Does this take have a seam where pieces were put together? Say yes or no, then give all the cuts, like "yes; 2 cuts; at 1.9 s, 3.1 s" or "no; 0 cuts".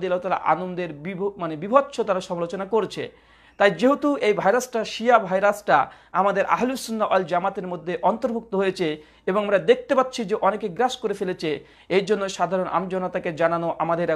no; 0 cuts